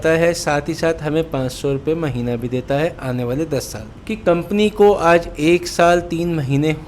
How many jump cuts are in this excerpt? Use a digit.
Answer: 0